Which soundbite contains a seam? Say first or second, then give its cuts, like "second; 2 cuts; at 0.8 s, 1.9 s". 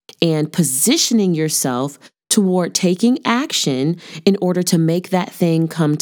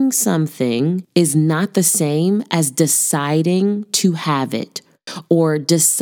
second; 1 cut; at 1.0 s